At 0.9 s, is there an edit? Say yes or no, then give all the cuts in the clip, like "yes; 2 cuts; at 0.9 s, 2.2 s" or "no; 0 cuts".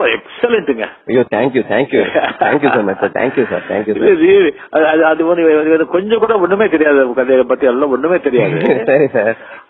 no; 0 cuts